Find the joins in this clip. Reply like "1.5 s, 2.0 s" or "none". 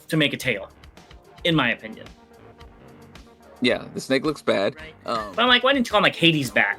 5.0 s